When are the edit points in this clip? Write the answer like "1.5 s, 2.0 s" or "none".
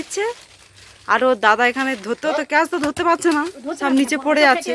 none